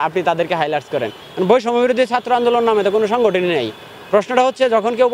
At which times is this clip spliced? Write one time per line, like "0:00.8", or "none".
0:01.2